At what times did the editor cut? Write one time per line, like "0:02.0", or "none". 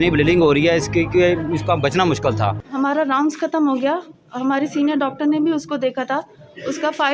0:02.7